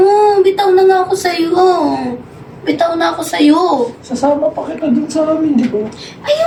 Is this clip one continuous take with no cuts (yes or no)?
yes